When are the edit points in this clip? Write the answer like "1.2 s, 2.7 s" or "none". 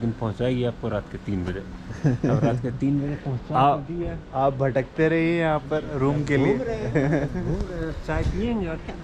none